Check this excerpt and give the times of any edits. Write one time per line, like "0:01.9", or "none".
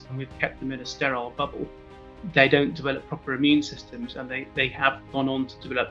none

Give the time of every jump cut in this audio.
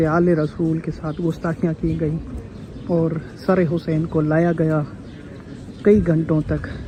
none

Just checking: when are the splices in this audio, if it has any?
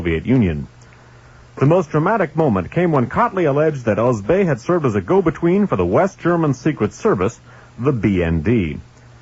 0:01.8

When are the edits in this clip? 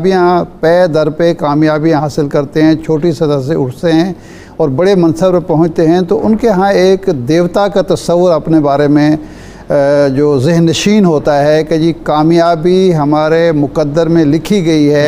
none

